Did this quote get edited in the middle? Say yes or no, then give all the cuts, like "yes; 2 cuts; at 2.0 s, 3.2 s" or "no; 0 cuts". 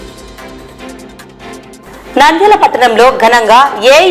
no; 0 cuts